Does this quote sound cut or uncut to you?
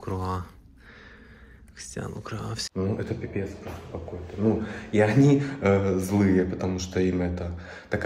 cut